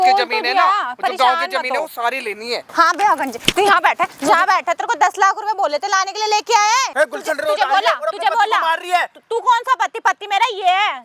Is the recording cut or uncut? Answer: cut